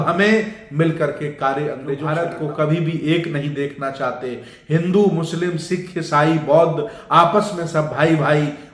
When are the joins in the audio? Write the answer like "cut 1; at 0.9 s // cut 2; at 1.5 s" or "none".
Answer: cut 1; at 2.1 s

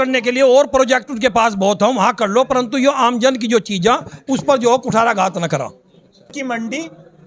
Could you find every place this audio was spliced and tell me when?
cut 1; at 6.3 s

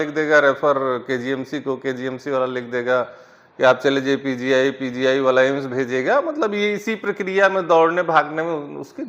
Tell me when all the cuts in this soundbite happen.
none

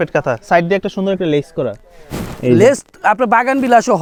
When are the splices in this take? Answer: none

